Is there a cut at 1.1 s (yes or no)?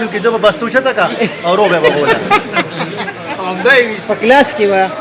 no